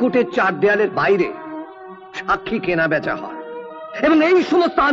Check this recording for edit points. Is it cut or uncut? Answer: uncut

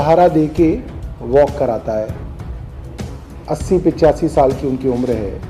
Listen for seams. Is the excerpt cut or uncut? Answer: cut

